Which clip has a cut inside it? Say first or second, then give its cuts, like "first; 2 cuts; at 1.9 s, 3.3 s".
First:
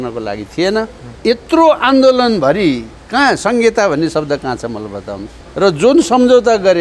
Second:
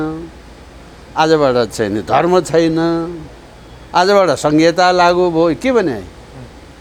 first; 2 cuts; at 1.0 s, 5.3 s